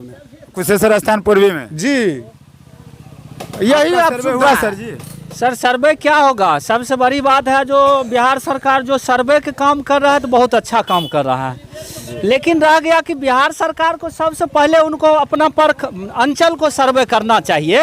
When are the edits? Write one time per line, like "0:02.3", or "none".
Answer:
none